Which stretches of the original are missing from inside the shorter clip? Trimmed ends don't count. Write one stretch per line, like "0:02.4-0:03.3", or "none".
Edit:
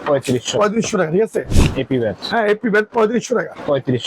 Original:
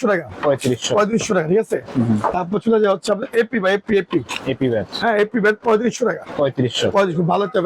0:01.9-0:04.3